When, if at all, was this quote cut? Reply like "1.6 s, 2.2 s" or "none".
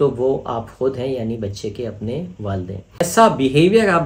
3.0 s